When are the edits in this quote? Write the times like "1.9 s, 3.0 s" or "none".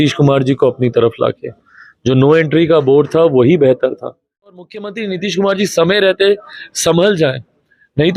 4.6 s